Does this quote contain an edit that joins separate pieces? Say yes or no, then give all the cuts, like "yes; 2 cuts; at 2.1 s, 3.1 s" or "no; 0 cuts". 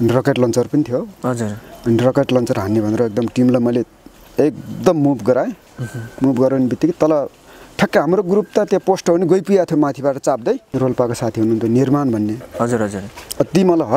yes; 1 cut; at 10.7 s